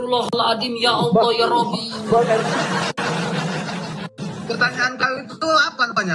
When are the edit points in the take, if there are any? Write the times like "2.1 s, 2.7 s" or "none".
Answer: 3.9 s